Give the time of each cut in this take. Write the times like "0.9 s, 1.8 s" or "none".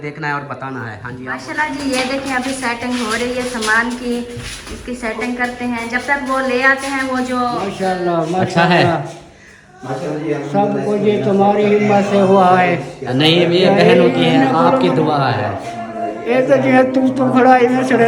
1.4 s, 7.7 s